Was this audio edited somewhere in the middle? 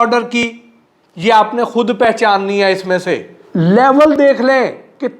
yes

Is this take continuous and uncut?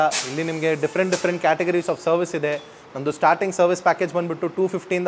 yes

